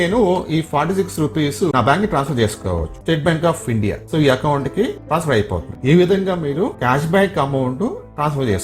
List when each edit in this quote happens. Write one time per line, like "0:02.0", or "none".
0:01.7
0:03.0
0:05.7